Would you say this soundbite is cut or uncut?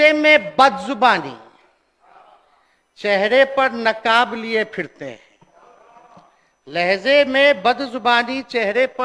uncut